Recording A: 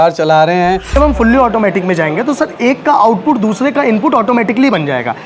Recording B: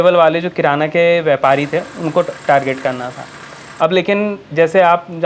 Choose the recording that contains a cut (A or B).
A